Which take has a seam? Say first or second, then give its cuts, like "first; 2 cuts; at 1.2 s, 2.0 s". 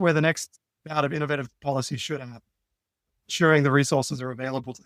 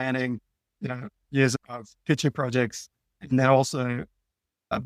second; 1 cut; at 1.5 s